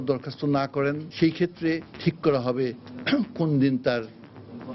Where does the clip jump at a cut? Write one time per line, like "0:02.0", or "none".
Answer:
0:01.1
0:01.9